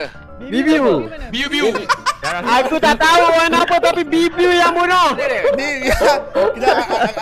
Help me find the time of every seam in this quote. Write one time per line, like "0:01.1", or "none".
0:02.3
0:05.2